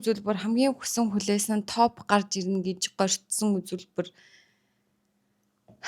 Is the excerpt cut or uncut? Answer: uncut